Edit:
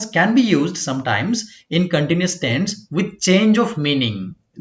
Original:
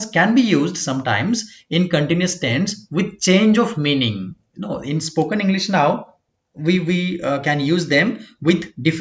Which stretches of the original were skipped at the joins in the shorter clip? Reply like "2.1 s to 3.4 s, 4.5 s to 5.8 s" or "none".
none